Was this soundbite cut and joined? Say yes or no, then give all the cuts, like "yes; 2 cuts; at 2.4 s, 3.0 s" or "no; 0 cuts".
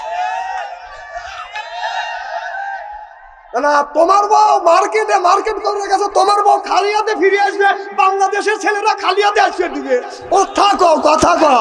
no; 0 cuts